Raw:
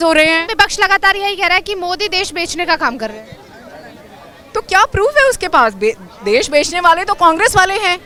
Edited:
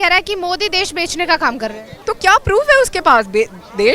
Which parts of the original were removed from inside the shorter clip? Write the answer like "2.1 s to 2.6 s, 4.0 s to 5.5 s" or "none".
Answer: 3.3 s to 4.4 s